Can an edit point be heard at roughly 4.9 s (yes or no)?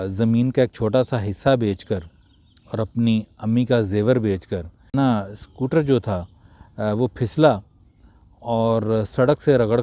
yes